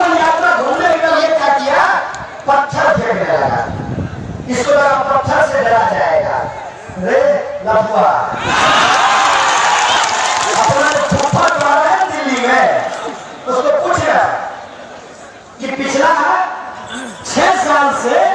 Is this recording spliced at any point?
yes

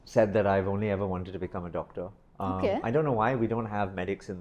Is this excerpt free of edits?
yes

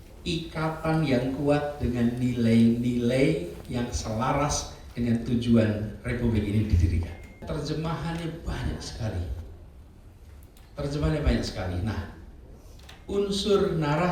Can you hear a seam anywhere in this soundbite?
yes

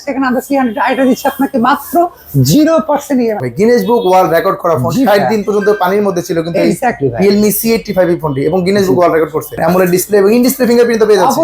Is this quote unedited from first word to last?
no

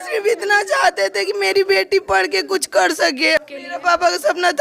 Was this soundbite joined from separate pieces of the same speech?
yes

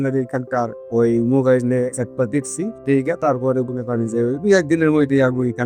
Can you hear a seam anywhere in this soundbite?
no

